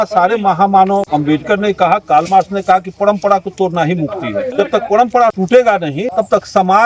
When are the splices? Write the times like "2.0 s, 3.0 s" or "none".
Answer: 1.1 s, 4.5 s, 5.4 s, 6.0 s

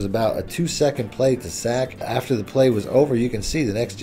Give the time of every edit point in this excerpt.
2.1 s

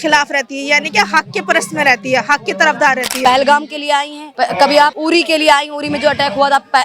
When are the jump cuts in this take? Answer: 3.1 s, 4.2 s, 5.0 s

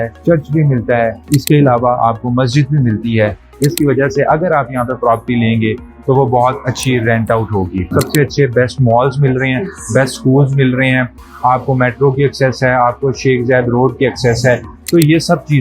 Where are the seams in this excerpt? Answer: 7.9 s

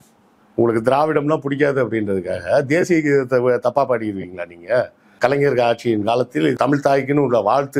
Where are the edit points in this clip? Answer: 5.0 s, 6.6 s

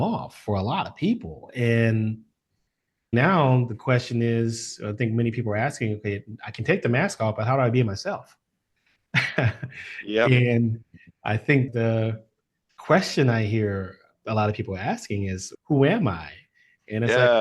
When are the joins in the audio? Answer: 3.1 s, 11.7 s

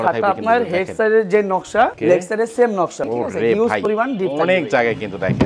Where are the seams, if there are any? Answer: 2.0 s, 3.1 s

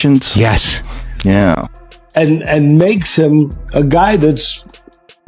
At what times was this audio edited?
1.6 s

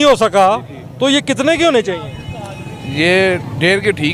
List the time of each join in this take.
none

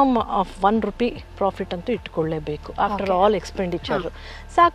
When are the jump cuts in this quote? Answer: none

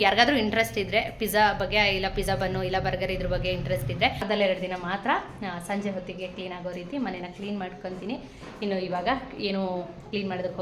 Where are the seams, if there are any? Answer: 4.2 s

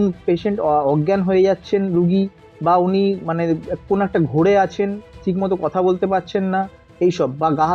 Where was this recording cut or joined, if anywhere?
none

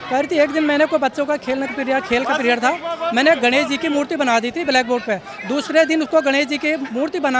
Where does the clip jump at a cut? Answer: none

